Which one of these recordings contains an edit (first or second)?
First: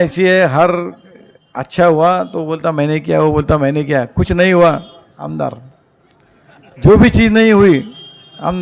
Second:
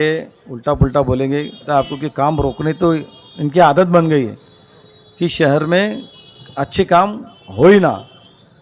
second